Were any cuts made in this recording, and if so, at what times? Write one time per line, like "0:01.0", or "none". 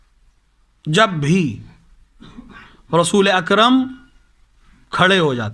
none